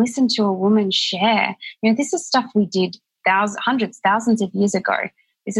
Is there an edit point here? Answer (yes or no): no